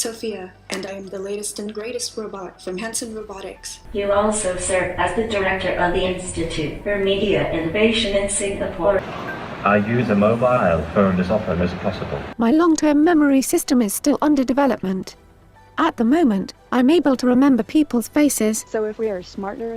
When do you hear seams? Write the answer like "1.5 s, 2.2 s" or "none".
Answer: 3.7 s, 9.0 s, 12.2 s, 18.6 s